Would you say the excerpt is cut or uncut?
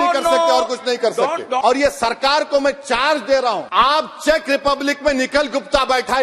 cut